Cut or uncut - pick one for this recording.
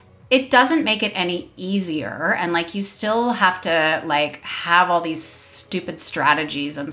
uncut